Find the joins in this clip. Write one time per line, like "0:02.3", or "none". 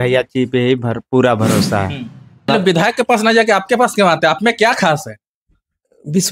0:02.5